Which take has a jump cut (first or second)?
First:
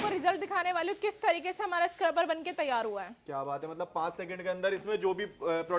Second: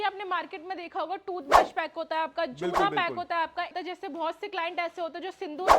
second